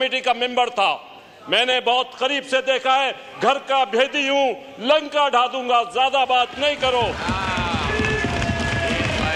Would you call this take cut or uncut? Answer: uncut